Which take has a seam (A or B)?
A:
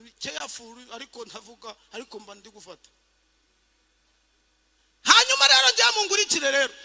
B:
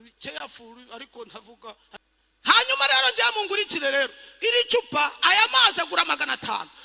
B